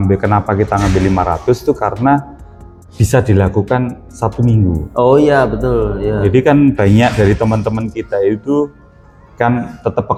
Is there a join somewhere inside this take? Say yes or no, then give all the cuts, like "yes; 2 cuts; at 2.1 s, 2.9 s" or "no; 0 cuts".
no; 0 cuts